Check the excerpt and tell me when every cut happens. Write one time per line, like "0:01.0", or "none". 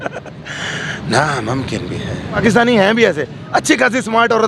0:02.4

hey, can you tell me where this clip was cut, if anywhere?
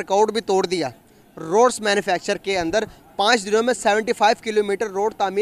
none

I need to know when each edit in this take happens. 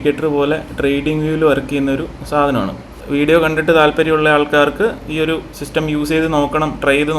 0:03.0

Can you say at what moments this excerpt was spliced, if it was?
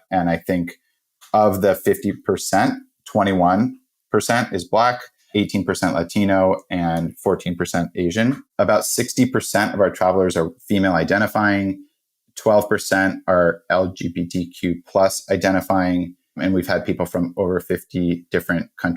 0:08.4

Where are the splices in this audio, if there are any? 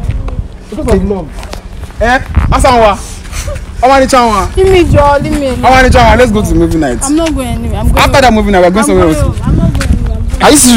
none

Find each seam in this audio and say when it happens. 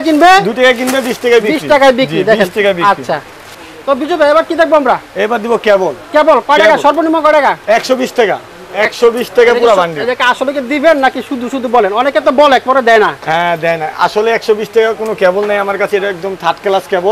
none

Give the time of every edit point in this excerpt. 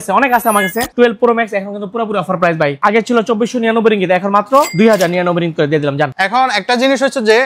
0:00.9
0:06.1

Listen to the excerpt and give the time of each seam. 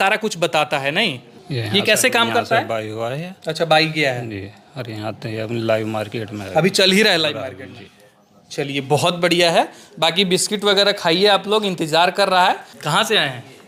none

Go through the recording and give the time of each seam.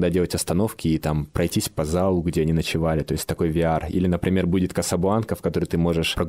none

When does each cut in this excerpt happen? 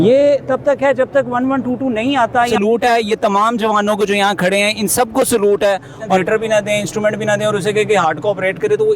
0:02.5
0:06.2

